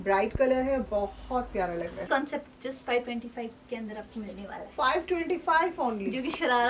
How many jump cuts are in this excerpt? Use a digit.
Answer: 1